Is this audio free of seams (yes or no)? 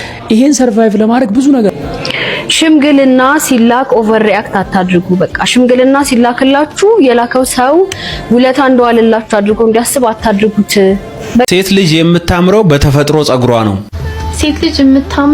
no